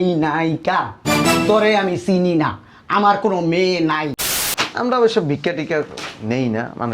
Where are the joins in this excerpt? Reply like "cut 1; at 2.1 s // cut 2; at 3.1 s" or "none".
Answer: cut 1; at 4.3 s